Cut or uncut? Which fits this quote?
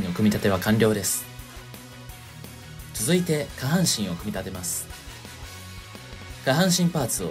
cut